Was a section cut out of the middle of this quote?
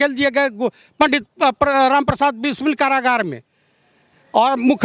no; 0 cuts

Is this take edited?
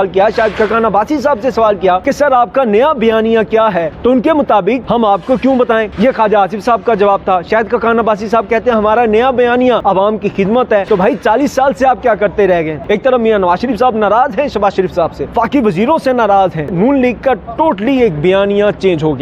yes; 9 cuts; at 2.0 s, 3.9 s, 4.8 s, 5.9 s, 9.8 s, 10.8 s, 12.8 s, 15.2 s, 16.7 s

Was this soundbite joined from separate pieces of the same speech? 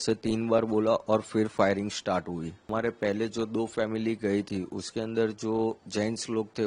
yes; 1 cut; at 2.7 s

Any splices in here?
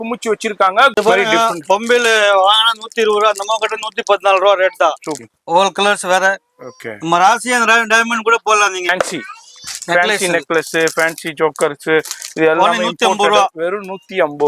yes; 3 cuts; at 0.9 s, 5.1 s, 8.9 s

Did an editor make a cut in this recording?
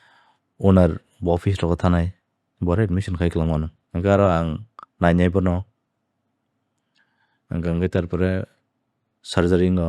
yes; 1 cut; at 3.8 s

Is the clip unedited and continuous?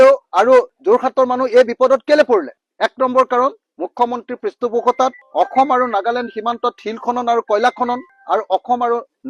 yes; 0 cuts

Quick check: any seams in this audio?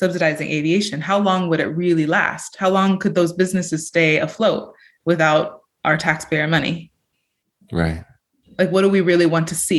no; 0 cuts

